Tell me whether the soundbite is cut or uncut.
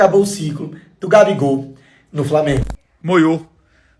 cut